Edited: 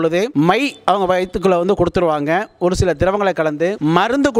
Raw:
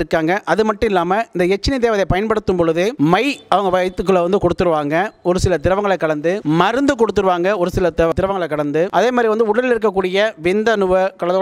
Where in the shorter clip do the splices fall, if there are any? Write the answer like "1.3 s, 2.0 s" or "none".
none